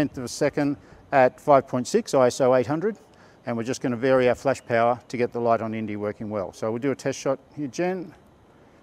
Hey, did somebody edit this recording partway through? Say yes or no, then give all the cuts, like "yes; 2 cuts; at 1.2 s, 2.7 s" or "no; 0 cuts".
no; 0 cuts